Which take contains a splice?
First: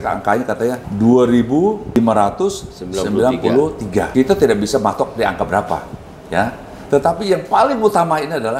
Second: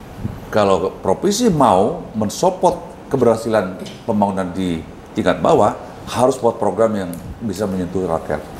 first; 3 cuts; at 0.9 s, 2.0 s, 4.1 s

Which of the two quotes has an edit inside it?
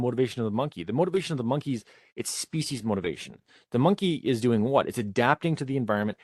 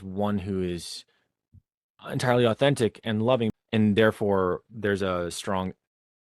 second; 1 cut; at 3.6 s

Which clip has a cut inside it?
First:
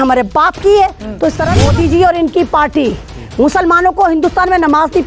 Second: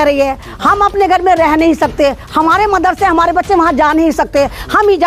first; 1 cut; at 1.5 s

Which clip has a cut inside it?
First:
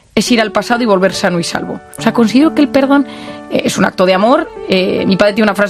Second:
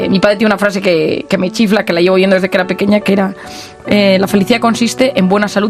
first; 1 cut; at 1.9 s

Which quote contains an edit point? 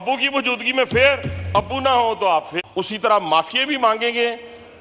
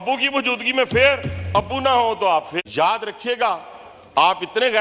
first; 1 cut; at 2.6 s

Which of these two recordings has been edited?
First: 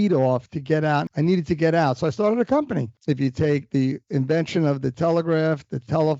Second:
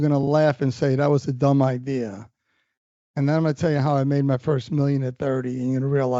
first; 2 cuts; at 1.1 s, 2.9 s

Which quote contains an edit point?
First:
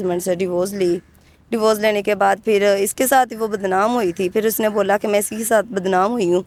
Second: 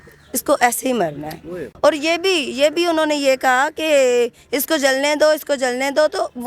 second; 1 cut; at 1.7 s

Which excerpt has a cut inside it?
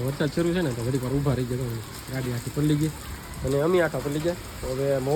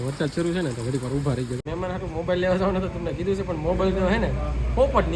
second; 1 cut; at 1.6 s

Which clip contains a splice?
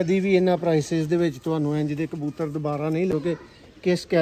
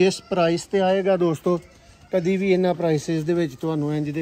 first; 1 cut; at 3.1 s

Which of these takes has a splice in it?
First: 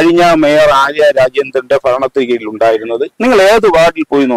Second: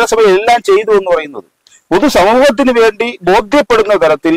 first; 1 cut; at 3.1 s

